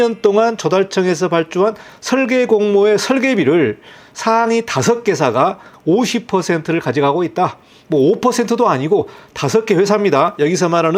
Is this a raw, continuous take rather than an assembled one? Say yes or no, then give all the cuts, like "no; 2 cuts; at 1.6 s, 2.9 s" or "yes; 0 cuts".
yes; 0 cuts